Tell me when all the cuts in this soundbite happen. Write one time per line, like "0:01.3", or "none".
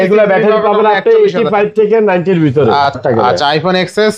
0:03.0